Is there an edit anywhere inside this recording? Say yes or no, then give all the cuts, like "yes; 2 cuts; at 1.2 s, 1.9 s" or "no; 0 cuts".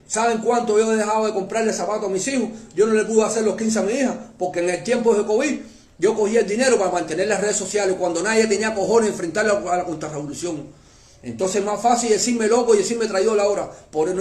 no; 0 cuts